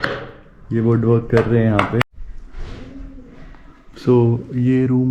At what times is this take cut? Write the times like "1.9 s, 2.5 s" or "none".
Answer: 2.0 s